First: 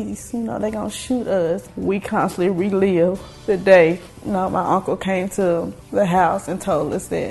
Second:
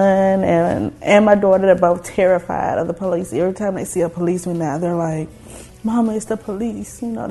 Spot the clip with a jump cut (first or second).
first